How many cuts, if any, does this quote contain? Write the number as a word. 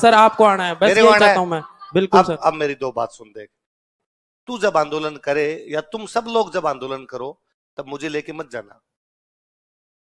one